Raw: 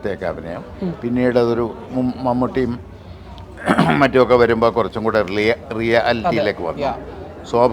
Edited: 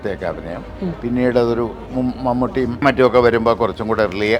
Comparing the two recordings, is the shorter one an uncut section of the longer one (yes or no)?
no